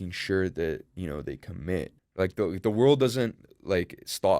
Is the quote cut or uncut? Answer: cut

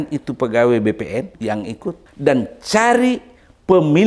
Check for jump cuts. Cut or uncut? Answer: cut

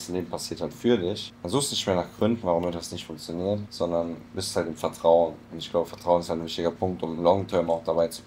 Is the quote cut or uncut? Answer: cut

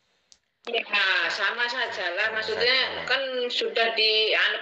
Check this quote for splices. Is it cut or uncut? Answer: uncut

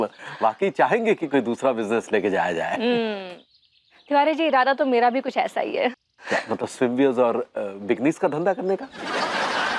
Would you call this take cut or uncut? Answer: uncut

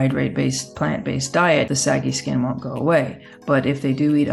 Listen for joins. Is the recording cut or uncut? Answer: cut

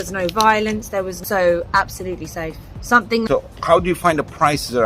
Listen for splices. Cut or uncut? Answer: cut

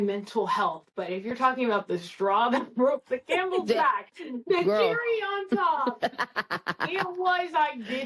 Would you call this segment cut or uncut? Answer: uncut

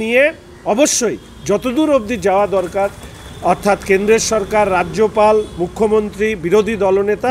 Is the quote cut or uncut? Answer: uncut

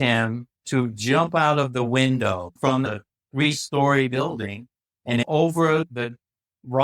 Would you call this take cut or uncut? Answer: cut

